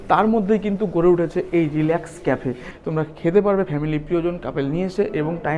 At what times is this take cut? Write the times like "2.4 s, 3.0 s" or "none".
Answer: 2.7 s

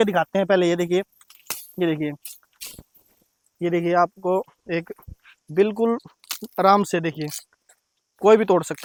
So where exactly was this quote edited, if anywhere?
none

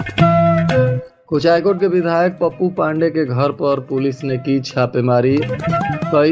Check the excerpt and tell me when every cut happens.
1.1 s

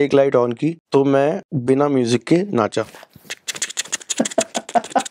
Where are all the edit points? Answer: 0.8 s, 1.5 s

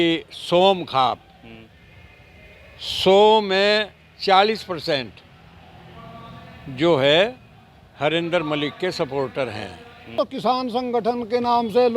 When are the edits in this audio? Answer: 10.1 s

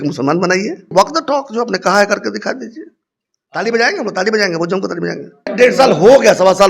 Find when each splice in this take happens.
0.9 s, 5.5 s

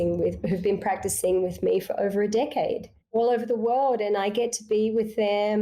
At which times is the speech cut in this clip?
2.9 s

